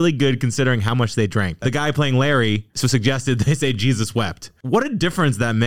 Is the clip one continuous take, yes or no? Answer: no